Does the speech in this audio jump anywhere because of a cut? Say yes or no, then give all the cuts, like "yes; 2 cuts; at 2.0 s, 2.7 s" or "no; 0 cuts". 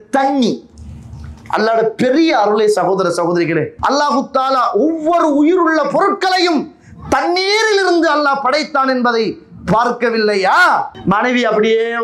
yes; 2 cuts; at 3.7 s, 10.9 s